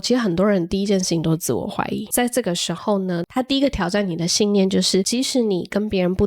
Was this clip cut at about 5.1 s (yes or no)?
yes